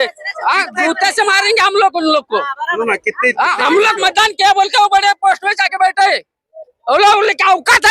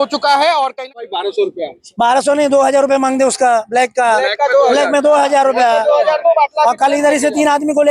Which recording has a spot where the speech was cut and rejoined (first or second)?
second